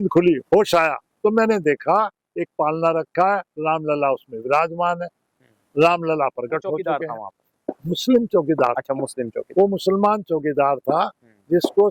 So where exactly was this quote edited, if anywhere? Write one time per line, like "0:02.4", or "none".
0:06.9